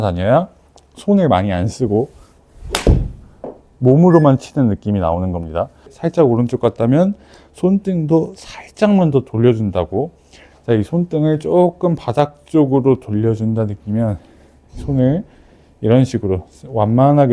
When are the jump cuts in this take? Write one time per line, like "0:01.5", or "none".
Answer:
0:06.0